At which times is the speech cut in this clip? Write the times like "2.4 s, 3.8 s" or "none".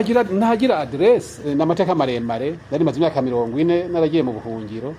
1.5 s, 2.6 s